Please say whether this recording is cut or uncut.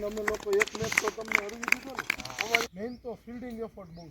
cut